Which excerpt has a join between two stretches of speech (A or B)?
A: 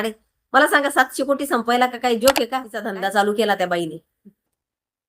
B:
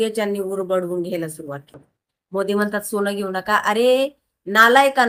A